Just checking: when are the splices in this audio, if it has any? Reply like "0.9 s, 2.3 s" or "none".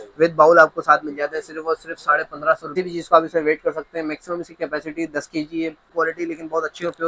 2.7 s, 5.9 s